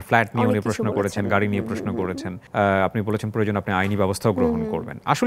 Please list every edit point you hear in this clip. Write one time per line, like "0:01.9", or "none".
0:02.3